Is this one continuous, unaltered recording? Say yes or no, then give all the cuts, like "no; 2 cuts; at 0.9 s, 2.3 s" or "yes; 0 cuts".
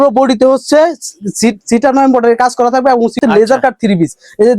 no; 1 cut; at 3.2 s